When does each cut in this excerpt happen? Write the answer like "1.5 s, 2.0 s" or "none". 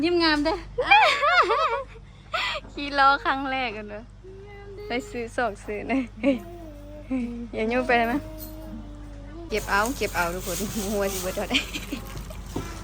9.5 s